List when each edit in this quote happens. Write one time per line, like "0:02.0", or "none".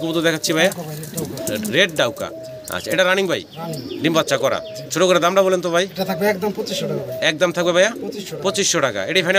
none